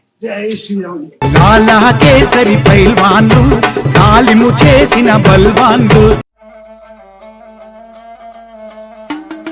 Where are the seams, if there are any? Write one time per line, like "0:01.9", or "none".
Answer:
0:01.1
0:06.4